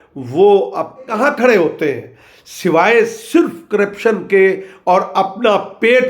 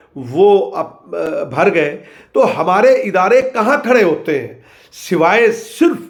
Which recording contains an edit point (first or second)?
first